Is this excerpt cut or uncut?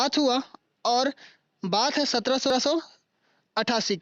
cut